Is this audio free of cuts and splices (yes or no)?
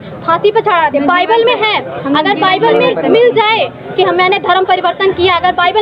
yes